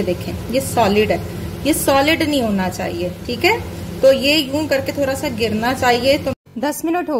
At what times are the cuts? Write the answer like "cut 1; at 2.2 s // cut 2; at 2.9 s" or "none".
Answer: cut 1; at 6.0 s